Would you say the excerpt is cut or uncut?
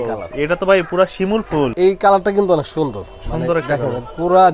cut